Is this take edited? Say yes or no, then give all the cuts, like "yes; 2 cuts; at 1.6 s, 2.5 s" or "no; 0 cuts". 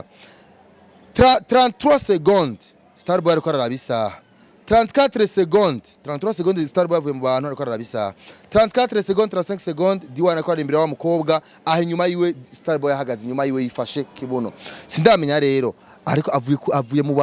no; 0 cuts